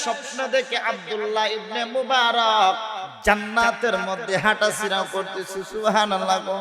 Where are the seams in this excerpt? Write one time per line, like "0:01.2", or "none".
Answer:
0:03.1